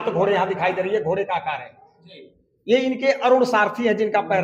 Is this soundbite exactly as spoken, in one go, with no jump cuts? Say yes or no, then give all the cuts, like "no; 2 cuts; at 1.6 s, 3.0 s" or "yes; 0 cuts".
yes; 0 cuts